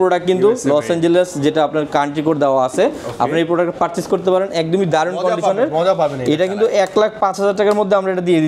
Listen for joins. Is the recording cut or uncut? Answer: uncut